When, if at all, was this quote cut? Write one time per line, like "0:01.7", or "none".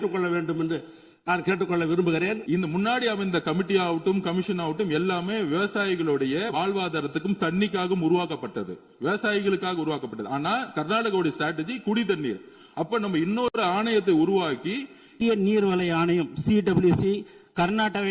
0:02.4
0:15.1